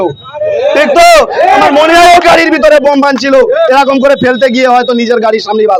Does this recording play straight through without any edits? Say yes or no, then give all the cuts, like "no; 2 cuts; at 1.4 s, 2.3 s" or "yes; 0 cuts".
yes; 0 cuts